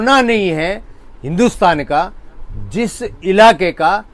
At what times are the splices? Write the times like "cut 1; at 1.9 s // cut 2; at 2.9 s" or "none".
none